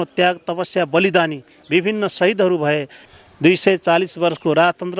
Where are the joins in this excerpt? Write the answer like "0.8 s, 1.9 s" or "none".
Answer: 3.0 s

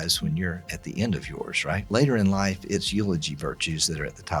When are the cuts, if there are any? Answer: 1.9 s

